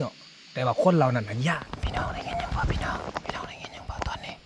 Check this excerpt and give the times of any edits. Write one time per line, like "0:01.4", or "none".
0:01.7